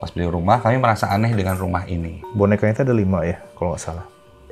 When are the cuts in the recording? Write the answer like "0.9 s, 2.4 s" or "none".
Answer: 2.2 s